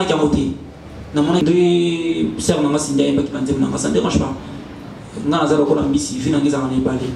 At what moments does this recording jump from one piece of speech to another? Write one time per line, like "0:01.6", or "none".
0:01.4